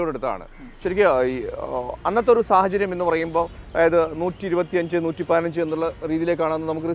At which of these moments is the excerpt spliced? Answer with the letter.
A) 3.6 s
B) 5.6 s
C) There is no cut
A